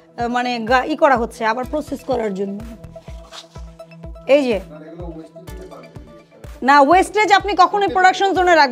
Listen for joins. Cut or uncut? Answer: uncut